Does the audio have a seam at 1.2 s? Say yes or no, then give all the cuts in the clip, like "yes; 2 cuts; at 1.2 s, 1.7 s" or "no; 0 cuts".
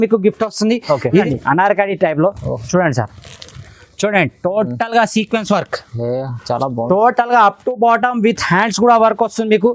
yes; 1 cut; at 1.2 s